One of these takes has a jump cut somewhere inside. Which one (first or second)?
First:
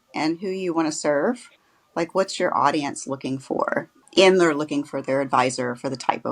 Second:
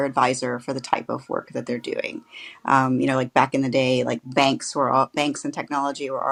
first